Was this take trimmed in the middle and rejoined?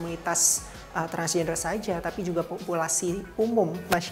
no; 0 cuts

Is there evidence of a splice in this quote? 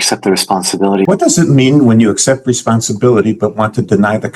yes; 1 cut; at 1.0 s

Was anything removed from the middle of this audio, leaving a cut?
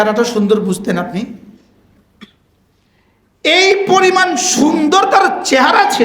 yes; 1 cut; at 2.0 s

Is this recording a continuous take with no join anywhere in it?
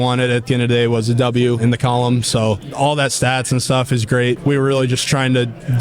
no; 3 cuts; at 1.6 s, 2.7 s, 4.4 s

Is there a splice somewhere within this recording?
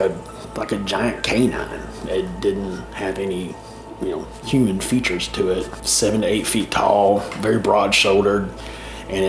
yes; 1 cut; at 5.8 s

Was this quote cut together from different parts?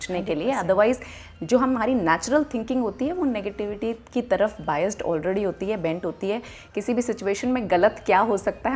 no; 0 cuts

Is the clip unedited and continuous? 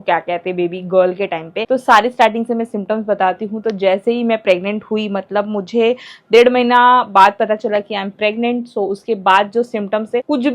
no; 1 cut; at 1.5 s

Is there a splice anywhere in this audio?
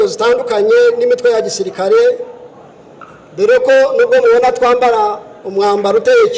no; 0 cuts

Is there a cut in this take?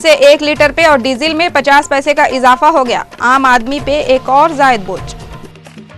no; 0 cuts

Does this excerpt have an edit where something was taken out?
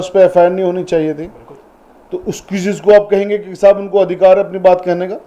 no; 0 cuts

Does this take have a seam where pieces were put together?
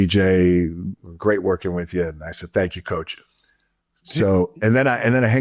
no; 0 cuts

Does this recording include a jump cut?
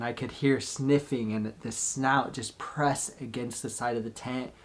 no; 0 cuts

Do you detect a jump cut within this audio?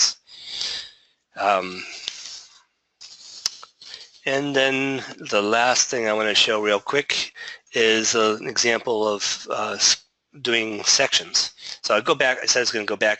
no; 0 cuts

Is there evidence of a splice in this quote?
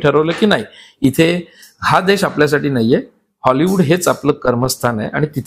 no; 0 cuts

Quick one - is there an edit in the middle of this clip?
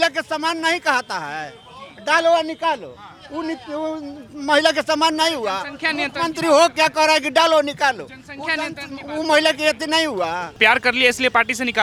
no; 0 cuts

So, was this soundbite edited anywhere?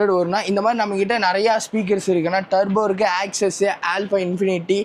no; 0 cuts

